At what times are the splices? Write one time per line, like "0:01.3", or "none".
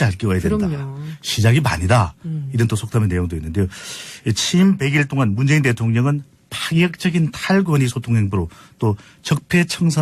0:07.4